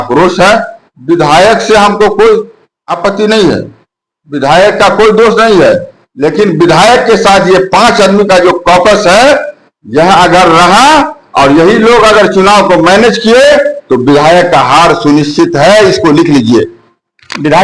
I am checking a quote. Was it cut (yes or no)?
no